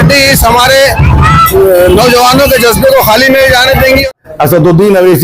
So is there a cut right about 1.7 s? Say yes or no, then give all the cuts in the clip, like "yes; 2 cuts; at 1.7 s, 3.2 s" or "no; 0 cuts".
no; 1 cut; at 4.0 s